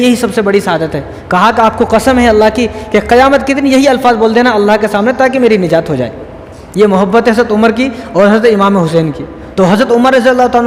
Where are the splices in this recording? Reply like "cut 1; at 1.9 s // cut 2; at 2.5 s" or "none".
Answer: none